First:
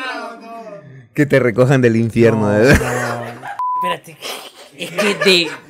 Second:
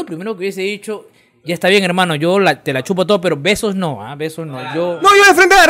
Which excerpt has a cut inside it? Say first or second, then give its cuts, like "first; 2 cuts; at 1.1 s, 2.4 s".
first; 1 cut; at 3.7 s